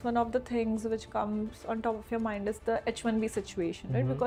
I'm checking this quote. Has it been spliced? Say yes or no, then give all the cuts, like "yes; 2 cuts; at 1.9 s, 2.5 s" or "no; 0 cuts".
no; 0 cuts